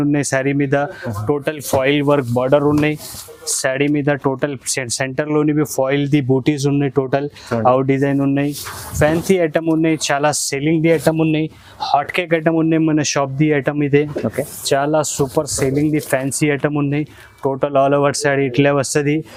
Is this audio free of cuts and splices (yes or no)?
yes